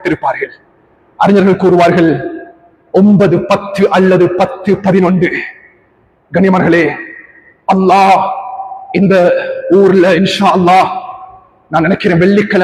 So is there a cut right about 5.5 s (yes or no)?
no